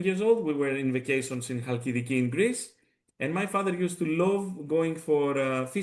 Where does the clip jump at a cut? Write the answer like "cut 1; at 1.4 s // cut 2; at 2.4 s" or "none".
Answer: none